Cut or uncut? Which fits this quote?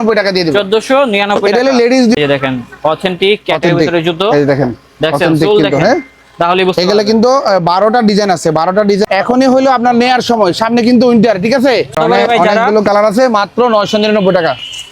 cut